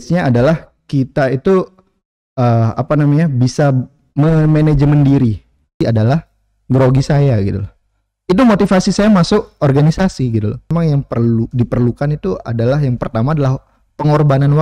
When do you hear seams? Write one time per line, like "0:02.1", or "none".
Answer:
0:05.8
0:10.7